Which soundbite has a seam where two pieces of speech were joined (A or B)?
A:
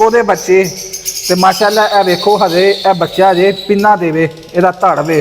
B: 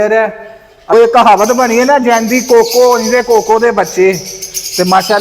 B